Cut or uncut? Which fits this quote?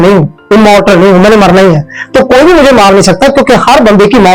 uncut